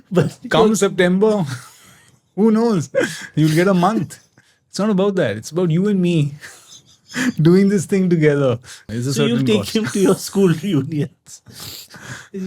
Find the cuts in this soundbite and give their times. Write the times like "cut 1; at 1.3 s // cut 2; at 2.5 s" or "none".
cut 1; at 8.8 s